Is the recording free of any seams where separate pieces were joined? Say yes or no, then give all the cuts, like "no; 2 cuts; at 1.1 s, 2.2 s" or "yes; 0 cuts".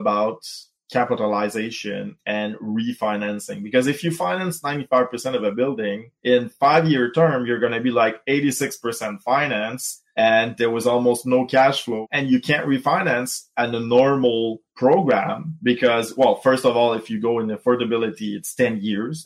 no; 2 cuts; at 6.1 s, 12.0 s